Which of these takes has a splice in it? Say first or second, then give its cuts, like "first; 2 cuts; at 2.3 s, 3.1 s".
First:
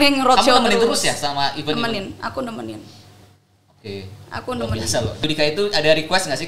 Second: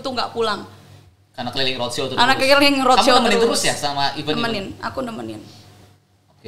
first; 1 cut; at 5.2 s